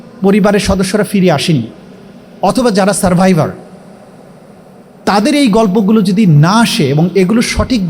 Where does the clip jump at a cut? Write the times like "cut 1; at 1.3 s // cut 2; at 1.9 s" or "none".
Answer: none